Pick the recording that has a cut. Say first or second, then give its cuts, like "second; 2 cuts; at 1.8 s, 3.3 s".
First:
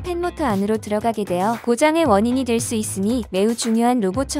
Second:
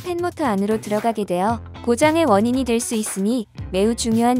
first; 2 cuts; at 1.6 s, 3.3 s